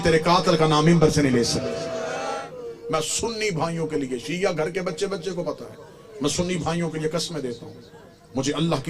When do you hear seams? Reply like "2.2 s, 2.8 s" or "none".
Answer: 2.4 s